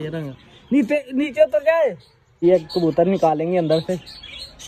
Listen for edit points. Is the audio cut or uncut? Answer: cut